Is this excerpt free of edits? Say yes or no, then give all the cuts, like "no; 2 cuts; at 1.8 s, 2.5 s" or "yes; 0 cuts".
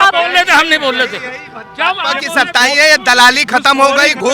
yes; 0 cuts